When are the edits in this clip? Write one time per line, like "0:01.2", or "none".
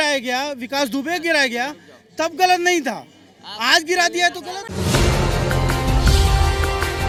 none